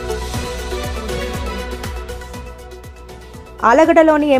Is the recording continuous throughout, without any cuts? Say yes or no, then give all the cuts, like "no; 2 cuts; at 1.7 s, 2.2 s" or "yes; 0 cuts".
yes; 0 cuts